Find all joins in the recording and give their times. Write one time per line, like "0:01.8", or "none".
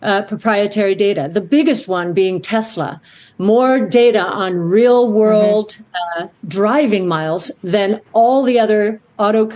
0:03.0